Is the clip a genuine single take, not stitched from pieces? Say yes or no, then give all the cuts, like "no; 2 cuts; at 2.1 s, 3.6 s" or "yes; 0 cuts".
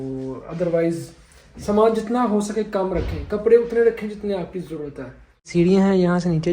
no; 1 cut; at 5.5 s